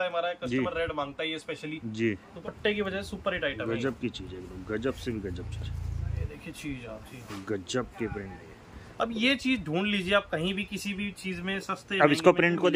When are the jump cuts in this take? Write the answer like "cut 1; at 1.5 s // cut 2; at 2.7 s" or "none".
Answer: cut 1; at 2.3 s // cut 2; at 6.2 s

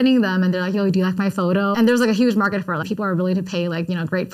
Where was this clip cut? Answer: cut 1; at 1.7 s // cut 2; at 2.9 s

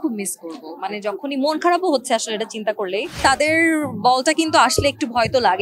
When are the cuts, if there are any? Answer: cut 1; at 3.2 s

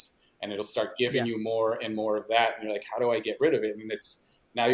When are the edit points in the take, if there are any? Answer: none

